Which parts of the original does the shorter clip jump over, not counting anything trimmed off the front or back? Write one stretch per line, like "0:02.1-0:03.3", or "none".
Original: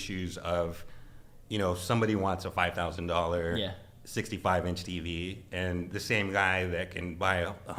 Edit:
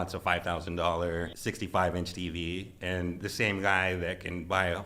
0:03.6-0:03.9